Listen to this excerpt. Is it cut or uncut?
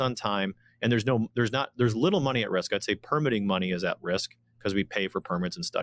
uncut